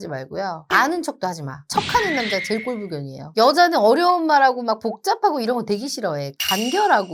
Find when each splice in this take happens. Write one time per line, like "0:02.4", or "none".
none